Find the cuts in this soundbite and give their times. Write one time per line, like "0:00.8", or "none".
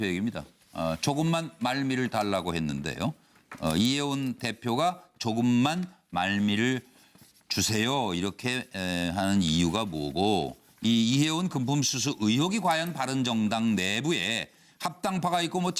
none

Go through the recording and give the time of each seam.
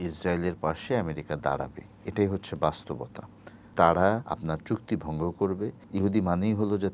0:03.7
0:04.3
0:05.8

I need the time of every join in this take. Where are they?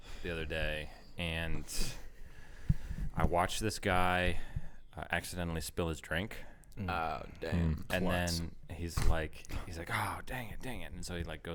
none

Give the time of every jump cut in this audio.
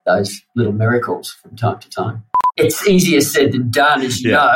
0:02.6

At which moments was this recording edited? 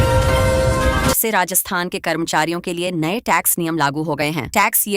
0:01.1

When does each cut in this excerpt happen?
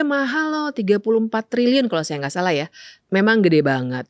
0:03.0

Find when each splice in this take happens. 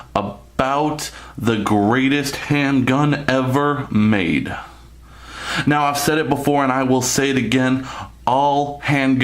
0:01.9

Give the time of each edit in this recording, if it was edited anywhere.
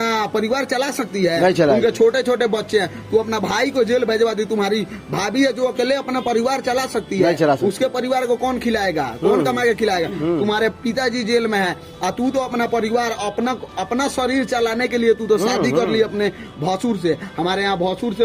none

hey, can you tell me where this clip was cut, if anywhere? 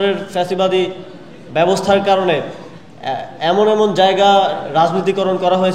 none

